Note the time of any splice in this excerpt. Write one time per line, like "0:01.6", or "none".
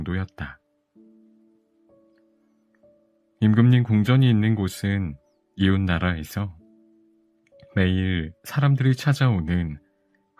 none